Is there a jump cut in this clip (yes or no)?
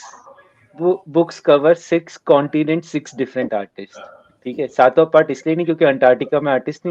no